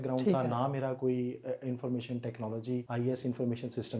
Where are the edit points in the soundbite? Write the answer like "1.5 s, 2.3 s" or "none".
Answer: 2.9 s